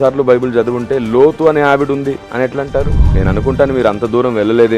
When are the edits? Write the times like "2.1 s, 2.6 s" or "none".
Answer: 3.0 s